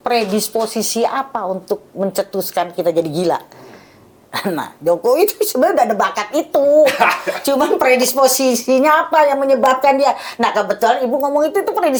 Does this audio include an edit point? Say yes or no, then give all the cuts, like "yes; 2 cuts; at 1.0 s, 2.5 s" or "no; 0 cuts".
no; 0 cuts